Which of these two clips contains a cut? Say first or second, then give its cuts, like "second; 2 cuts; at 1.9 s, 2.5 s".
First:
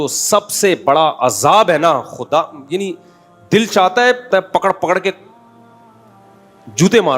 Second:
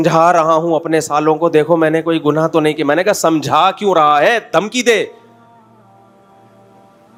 first; 1 cut; at 4.3 s